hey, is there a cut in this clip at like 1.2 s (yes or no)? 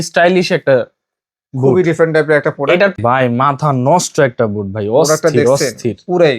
no